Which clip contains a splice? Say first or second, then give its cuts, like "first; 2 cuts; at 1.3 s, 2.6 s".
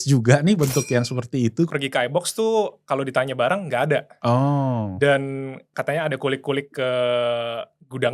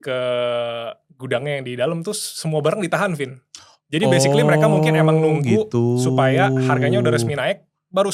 first; 3 cuts; at 1.7 s, 4.1 s, 5.7 s